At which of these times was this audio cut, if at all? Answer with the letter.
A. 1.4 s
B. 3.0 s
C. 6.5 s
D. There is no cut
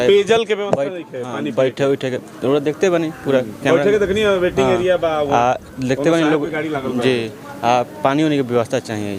D